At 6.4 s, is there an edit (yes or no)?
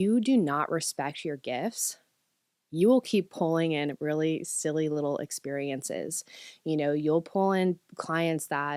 no